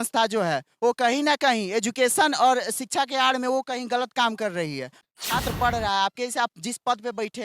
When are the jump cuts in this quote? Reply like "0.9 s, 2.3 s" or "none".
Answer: 5.0 s